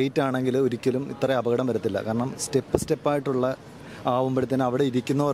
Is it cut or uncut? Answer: uncut